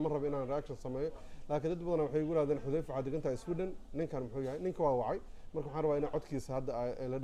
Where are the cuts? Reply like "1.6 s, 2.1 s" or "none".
none